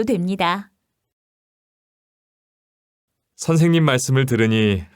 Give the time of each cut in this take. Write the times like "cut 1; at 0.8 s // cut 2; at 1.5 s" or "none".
cut 1; at 3.8 s